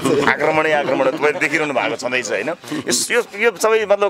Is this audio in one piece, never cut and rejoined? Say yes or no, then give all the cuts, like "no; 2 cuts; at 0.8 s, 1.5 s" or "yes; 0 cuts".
yes; 0 cuts